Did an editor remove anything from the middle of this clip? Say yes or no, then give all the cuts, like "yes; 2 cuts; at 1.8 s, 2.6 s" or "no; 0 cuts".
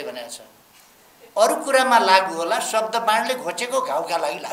no; 0 cuts